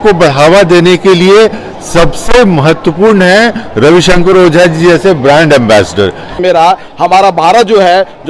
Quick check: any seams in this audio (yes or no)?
yes